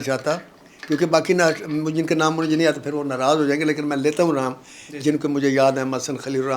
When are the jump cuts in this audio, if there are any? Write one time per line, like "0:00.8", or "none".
none